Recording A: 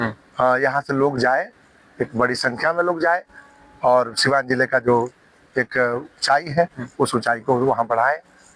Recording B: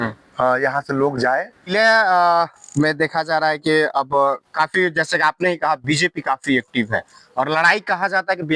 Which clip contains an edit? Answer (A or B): B